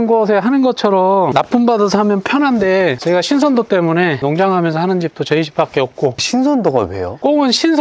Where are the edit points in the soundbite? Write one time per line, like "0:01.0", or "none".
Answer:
none